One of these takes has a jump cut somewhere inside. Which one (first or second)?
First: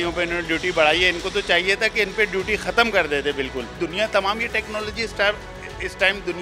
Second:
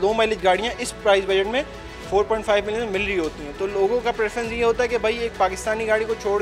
first